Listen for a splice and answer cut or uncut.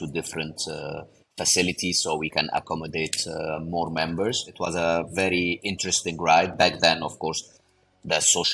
cut